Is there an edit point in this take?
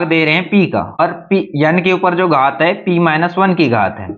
yes; 1 cut; at 1.0 s

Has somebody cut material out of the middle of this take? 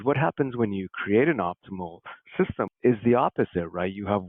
yes; 1 cut; at 2.7 s

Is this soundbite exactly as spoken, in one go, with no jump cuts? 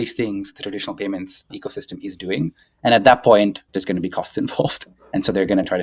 no; 2 cuts; at 1.5 s, 3.6 s

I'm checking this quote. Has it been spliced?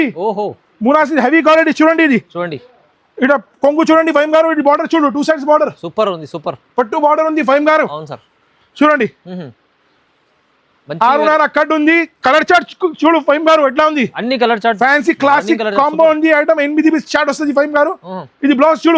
no; 0 cuts

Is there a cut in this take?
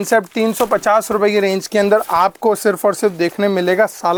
no; 0 cuts

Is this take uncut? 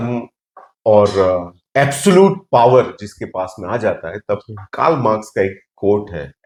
yes; 0 cuts

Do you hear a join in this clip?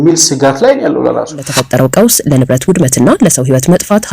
yes; 1 cut; at 1.5 s

